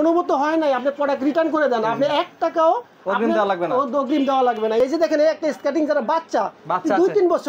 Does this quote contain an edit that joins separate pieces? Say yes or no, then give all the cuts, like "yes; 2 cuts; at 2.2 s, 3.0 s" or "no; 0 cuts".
yes; 1 cut; at 4.8 s